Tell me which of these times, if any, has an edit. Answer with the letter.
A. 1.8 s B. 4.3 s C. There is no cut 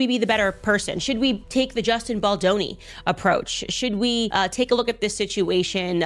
B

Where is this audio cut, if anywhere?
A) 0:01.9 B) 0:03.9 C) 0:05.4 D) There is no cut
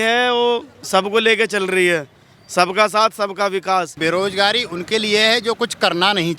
B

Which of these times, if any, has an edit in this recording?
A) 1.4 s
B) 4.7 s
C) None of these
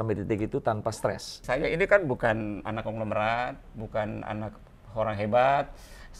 A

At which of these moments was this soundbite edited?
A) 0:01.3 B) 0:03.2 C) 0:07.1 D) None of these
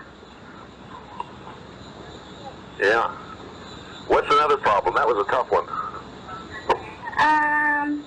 B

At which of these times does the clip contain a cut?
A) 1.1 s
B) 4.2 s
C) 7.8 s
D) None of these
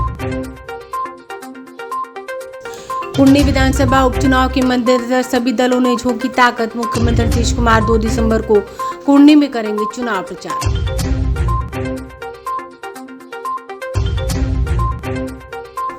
A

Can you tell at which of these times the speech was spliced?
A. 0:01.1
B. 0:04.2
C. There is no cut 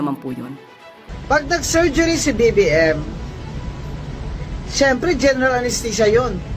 A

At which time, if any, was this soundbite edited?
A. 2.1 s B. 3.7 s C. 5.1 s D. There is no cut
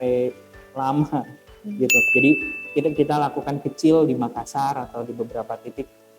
A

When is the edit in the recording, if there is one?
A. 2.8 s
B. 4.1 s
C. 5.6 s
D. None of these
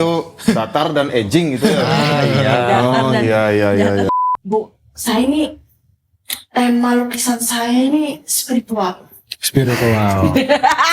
B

